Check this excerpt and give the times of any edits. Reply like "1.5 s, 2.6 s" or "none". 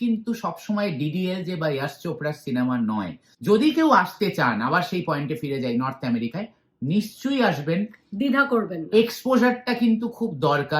3.2 s